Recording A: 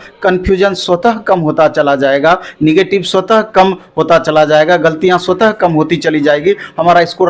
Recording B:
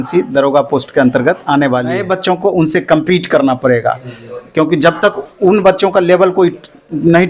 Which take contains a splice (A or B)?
B